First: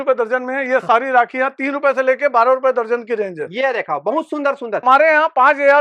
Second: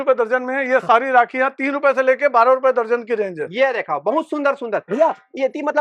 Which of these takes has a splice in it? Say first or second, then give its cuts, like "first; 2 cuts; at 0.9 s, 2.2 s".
first; 1 cut; at 4.8 s